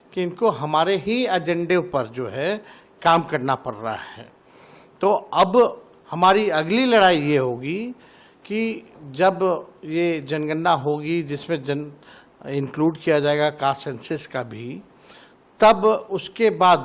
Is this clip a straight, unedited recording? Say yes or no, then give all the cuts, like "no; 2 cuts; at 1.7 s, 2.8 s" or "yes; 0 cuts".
yes; 0 cuts